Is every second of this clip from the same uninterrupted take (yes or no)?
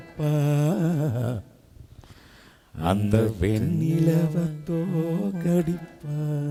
yes